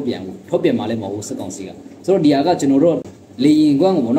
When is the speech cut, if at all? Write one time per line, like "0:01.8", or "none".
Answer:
0:03.0